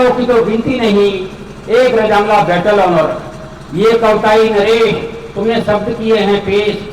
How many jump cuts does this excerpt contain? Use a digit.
0